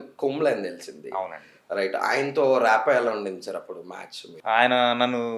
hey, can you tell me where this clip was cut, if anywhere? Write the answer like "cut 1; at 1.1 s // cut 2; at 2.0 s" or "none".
cut 1; at 4.3 s